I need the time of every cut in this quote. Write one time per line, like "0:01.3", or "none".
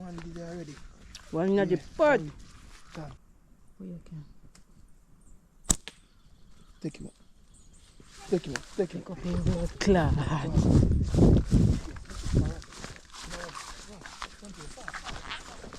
0:03.2